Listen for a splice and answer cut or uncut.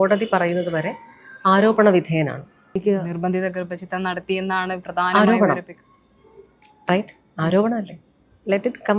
cut